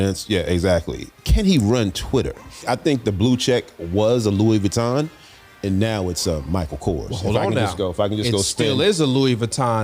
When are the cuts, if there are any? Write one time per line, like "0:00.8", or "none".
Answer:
0:01.1
0:02.6